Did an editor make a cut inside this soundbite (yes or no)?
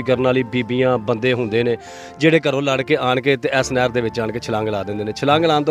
no